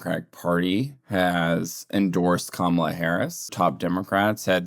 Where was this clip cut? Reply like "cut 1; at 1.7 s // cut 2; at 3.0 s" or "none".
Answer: cut 1; at 3.5 s